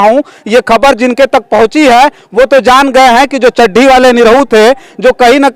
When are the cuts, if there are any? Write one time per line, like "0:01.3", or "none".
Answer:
none